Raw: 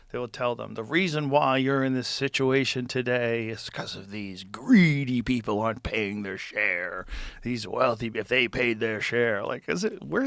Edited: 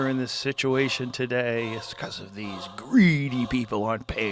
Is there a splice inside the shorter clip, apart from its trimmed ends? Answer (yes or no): no